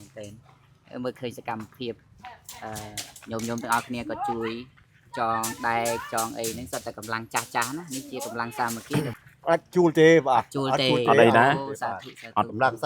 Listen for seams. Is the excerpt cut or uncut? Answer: cut